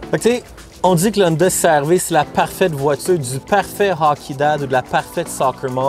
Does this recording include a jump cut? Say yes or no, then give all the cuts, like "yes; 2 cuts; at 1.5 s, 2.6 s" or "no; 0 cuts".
no; 0 cuts